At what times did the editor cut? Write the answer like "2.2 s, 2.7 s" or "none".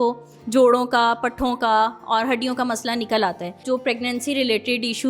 3.6 s